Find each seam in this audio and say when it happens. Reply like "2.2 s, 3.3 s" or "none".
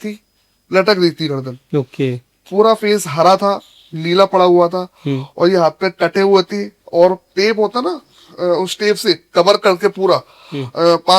none